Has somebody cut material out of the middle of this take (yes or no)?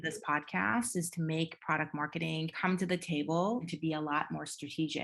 yes